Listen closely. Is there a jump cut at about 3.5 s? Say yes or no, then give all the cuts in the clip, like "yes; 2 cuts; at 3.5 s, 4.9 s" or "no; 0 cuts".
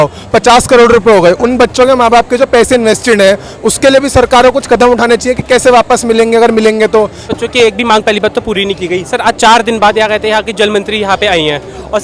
no; 1 cut; at 7.2 s